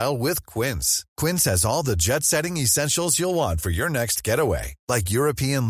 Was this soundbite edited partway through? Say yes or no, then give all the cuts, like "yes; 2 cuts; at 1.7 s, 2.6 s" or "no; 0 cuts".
no; 0 cuts